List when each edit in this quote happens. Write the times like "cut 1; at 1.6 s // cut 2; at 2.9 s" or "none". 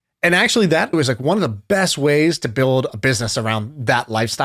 cut 1; at 0.9 s

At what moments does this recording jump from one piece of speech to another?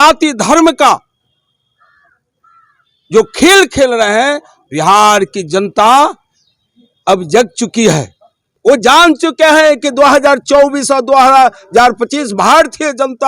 cut 1; at 8.5 s

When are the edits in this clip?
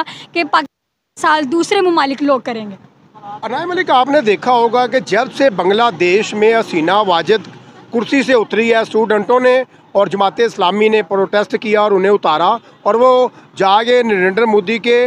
none

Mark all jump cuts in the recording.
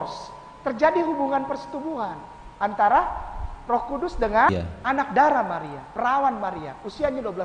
cut 1; at 4.5 s

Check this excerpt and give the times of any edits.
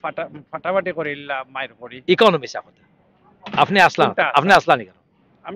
none

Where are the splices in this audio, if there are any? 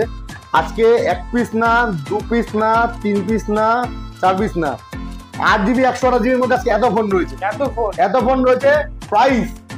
none

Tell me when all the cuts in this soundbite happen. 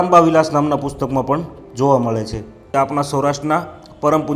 cut 1; at 2.5 s

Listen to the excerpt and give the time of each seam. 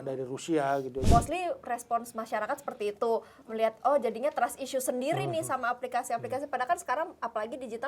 cut 1; at 1.1 s

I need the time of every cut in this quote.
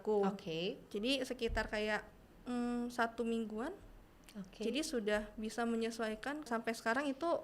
cut 1; at 6.5 s

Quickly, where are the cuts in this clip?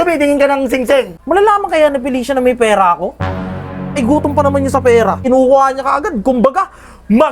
cut 1; at 1.2 s // cut 2; at 5.2 s

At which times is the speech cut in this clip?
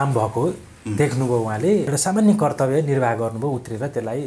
cut 1; at 1.9 s

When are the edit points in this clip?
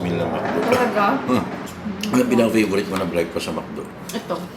cut 1; at 1.7 s

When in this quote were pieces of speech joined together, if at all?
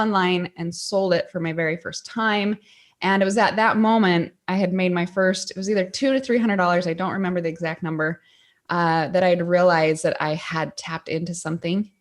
none

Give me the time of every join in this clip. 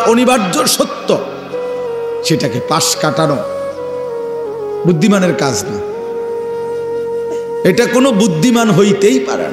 cut 1; at 5.6 s // cut 2; at 7.4 s

